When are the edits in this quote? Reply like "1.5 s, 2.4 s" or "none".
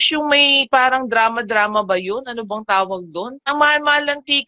3.5 s

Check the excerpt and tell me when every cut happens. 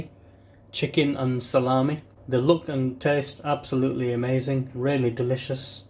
2.1 s

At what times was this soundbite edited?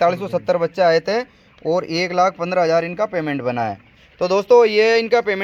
none

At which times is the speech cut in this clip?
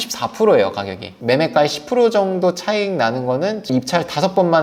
1.1 s

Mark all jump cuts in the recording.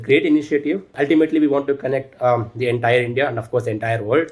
0.9 s

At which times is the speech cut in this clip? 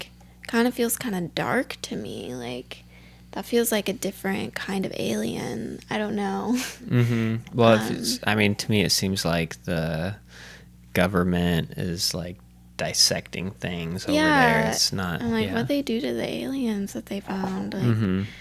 none

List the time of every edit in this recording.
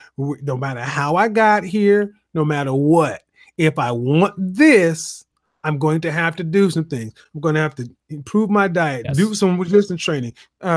9.0 s

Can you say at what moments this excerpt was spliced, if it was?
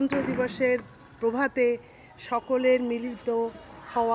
none

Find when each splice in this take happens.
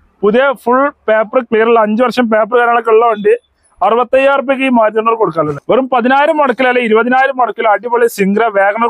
5.5 s

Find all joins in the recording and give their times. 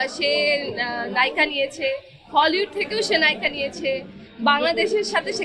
none

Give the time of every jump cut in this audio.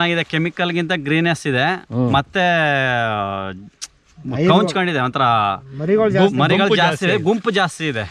none

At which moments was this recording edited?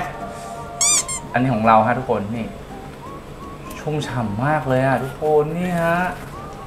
none

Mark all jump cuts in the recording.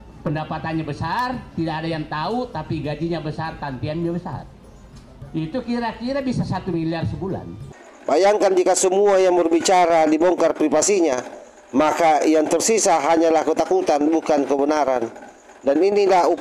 7.6 s

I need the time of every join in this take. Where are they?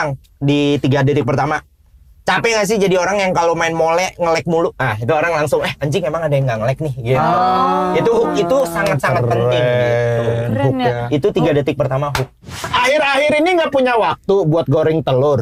12.6 s

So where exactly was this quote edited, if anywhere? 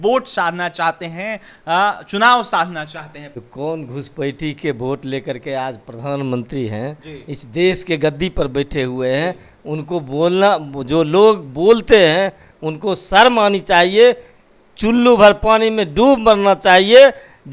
3.4 s

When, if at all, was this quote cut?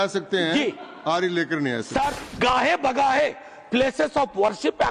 2.2 s

